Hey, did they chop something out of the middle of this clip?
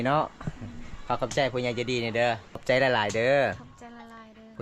yes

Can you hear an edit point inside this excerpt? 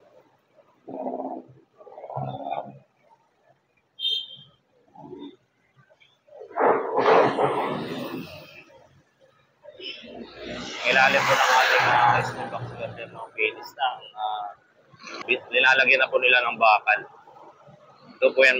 yes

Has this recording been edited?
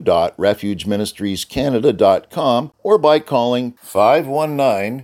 yes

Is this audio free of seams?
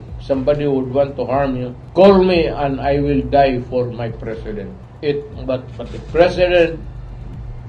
no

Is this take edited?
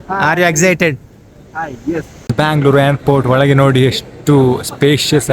yes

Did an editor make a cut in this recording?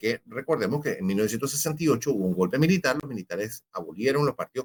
no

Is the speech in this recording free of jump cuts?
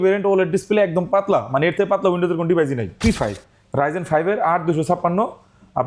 no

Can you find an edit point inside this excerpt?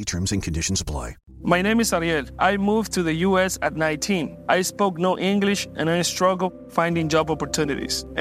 yes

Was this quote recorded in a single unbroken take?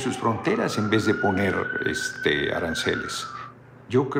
yes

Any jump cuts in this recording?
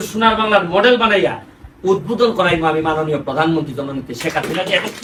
no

